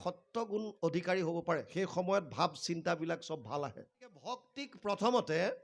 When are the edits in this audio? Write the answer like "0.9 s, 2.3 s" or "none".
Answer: 4.6 s